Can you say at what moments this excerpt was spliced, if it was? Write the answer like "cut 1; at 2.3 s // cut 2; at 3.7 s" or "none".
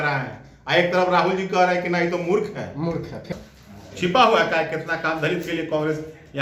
cut 1; at 3.3 s